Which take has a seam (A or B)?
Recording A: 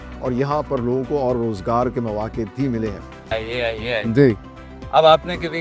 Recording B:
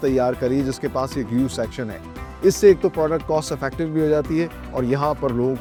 A